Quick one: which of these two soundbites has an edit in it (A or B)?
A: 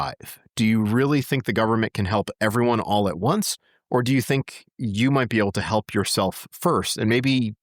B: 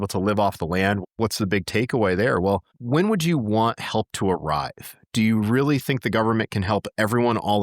B